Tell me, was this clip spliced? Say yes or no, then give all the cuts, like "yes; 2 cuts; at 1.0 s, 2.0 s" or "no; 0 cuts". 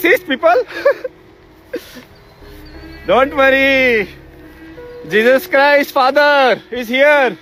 no; 0 cuts